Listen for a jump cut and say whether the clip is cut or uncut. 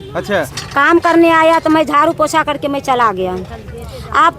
uncut